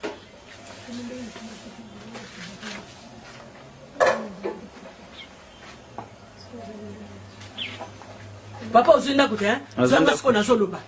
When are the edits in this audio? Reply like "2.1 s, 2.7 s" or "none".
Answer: none